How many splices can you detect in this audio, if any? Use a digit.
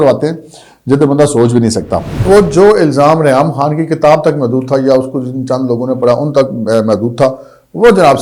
1